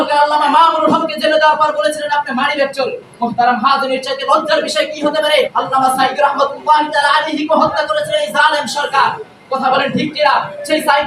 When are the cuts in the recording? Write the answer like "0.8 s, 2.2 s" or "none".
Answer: 5.5 s